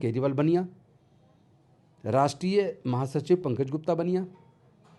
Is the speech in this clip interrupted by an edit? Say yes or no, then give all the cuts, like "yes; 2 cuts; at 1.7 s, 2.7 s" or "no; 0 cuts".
no; 0 cuts